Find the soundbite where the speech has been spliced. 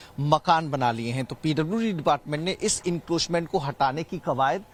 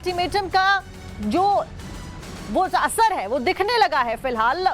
second; 1 cut; at 3.2 s

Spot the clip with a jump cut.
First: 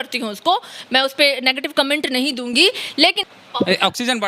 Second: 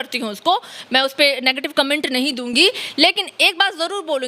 first; 1 cut; at 3.3 s

